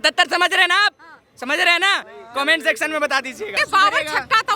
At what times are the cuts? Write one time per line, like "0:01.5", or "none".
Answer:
0:03.6